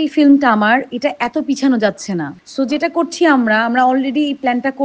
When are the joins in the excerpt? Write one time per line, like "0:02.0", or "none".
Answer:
none